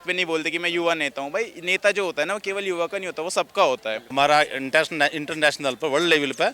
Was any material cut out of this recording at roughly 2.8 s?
no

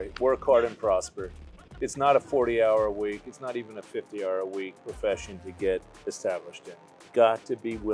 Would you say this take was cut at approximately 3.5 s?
no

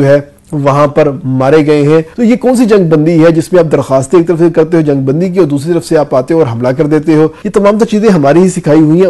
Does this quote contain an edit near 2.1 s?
yes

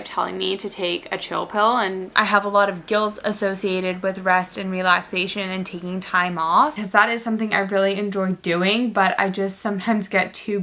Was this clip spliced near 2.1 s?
yes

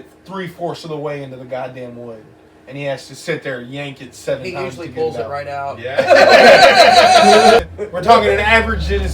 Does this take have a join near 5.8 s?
no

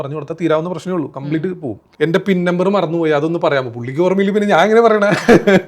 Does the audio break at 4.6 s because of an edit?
no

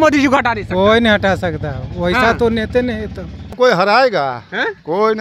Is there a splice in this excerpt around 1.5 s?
no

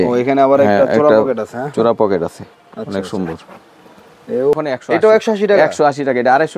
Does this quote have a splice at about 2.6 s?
no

